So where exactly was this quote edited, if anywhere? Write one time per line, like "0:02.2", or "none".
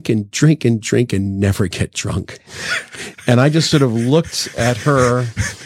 none